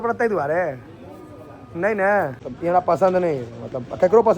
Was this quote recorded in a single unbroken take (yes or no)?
no